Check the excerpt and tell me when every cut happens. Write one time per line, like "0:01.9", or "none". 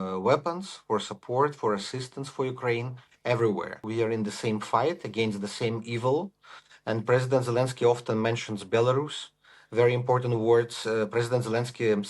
0:03.8